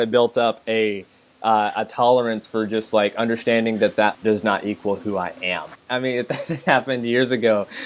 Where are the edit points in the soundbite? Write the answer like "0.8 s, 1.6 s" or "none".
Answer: 4.2 s, 5.8 s